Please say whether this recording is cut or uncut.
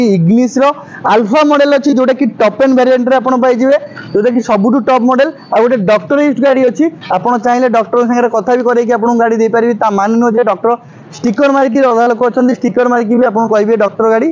uncut